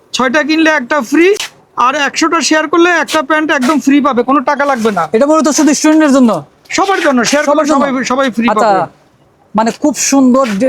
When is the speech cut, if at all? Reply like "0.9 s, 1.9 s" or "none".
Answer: none